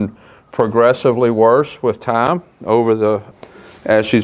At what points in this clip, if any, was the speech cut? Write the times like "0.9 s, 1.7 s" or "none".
3.3 s